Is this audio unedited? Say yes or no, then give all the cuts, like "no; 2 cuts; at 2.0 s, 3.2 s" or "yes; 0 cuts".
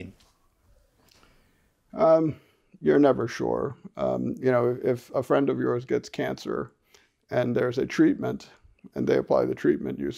yes; 0 cuts